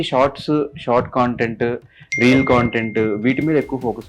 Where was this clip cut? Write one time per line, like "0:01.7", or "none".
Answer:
none